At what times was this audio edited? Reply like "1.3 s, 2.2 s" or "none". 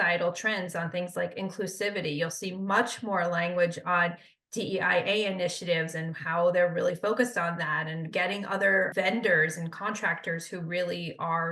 8.9 s

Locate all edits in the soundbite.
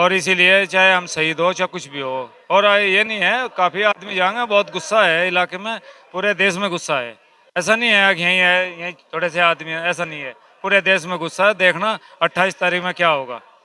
none

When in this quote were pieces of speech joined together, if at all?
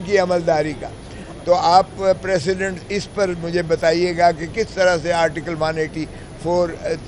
none

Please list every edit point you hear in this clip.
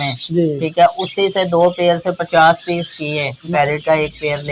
3.4 s

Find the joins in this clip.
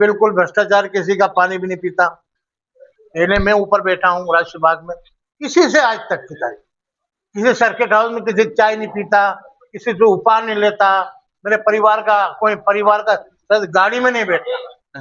none

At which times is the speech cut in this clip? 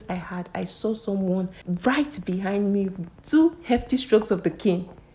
1.6 s

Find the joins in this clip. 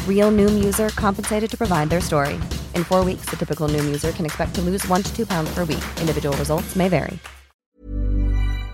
7.6 s

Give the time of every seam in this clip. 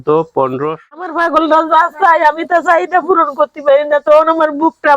0.9 s

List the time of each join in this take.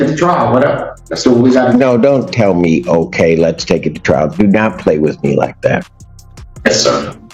none

